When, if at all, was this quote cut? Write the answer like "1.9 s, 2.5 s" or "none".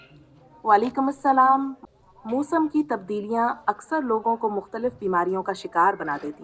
1.8 s